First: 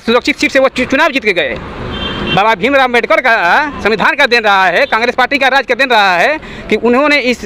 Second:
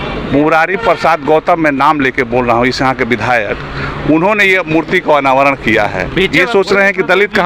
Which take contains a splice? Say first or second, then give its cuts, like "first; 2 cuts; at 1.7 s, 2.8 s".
second; 1 cut; at 6.3 s